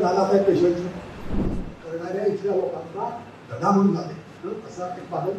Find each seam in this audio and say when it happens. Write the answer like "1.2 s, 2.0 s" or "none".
1.5 s